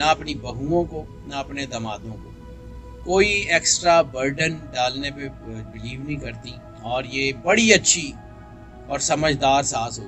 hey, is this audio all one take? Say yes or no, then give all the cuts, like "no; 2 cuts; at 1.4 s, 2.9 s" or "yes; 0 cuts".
yes; 0 cuts